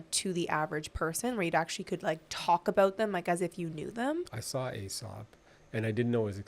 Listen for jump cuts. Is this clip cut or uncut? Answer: cut